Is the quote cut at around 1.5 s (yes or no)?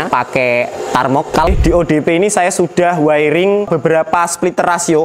yes